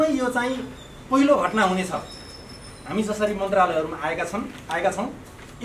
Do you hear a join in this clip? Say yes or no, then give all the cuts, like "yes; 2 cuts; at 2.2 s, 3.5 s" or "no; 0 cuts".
no; 0 cuts